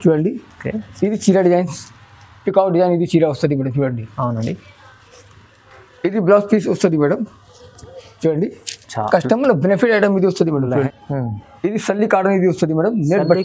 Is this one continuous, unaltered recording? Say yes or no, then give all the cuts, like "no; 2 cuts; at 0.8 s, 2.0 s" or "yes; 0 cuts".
no; 1 cut; at 10.9 s